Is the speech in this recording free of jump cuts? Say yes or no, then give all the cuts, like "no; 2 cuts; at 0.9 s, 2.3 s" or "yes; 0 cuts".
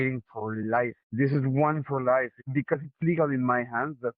no; 2 cuts; at 1.0 s, 2.4 s